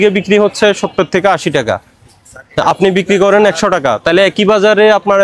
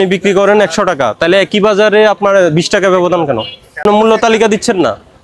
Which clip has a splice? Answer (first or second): second